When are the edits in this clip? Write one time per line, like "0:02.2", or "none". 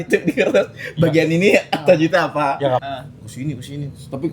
0:02.8